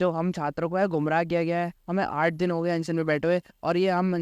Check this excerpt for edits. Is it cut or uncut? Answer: uncut